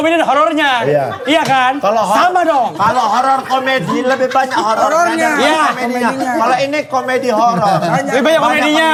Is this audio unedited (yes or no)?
yes